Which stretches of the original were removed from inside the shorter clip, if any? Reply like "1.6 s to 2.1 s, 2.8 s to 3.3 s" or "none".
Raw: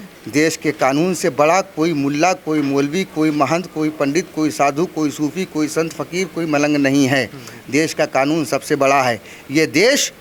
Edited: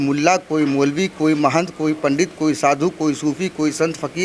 none